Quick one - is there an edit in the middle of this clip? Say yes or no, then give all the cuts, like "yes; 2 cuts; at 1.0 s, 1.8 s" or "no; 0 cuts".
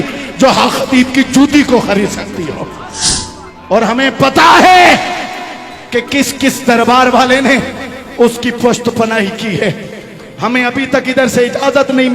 yes; 1 cut; at 3.0 s